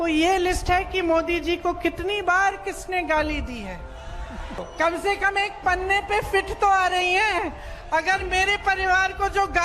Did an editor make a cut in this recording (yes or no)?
yes